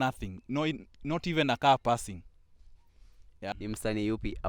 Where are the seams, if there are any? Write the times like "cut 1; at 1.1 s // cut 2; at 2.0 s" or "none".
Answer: cut 1; at 3.5 s